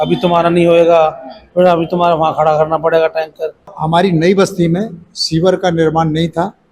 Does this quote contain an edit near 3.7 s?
yes; 1 cut; at 3.7 s

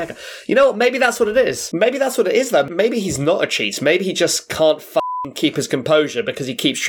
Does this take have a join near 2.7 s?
yes; 2 cuts; at 1.6 s, 2.7 s

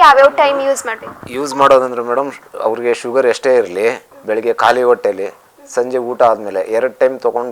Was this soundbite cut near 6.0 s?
no; 1 cut; at 4.1 s

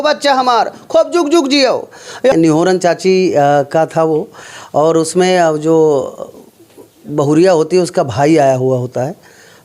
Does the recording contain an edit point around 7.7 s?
no; 1 cut; at 2.3 s

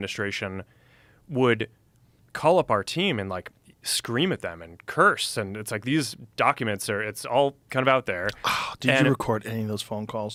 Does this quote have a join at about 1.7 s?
no; 0 cuts

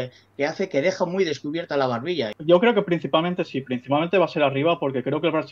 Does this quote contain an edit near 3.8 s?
no; 1 cut; at 2.3 s

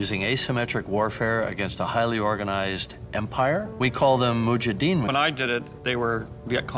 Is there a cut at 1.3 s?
no; 2 cuts; at 3.9 s, 5.1 s

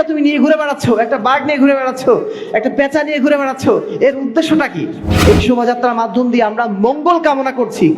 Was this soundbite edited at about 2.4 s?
no; 1 cut; at 5.1 s

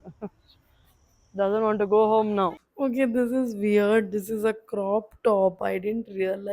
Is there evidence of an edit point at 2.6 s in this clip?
yes; 1 cut; at 2.6 s

